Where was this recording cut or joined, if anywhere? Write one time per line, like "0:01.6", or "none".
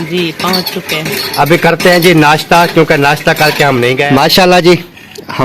0:04.1